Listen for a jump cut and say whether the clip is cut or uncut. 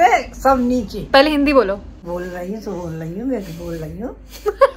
cut